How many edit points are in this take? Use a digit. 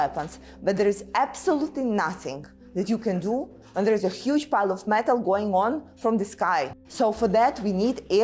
1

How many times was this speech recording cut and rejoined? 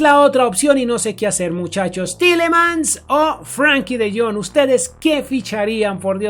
0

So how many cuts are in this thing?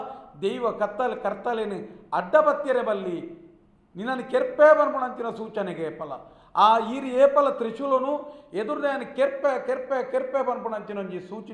0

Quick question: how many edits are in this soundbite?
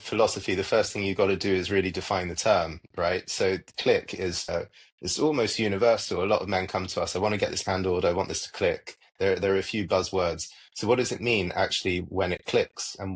1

